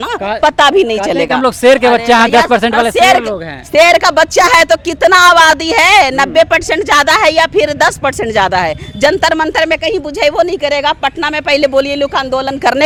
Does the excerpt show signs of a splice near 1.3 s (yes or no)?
no